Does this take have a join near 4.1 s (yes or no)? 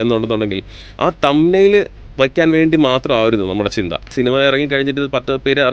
yes